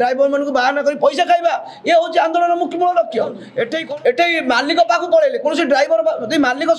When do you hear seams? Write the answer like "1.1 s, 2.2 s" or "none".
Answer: 3.8 s